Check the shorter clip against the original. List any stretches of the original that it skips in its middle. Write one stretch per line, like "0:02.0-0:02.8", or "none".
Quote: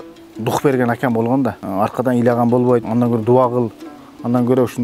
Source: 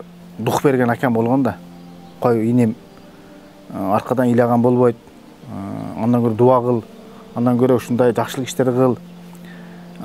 0:01.6-0:03.7
0:05.0-0:06.0